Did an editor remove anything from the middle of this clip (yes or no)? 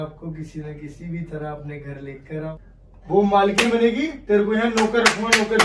yes